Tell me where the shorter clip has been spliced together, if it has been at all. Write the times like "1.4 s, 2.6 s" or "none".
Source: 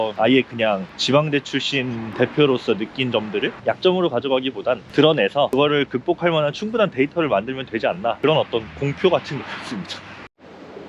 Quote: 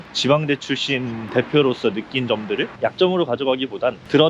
none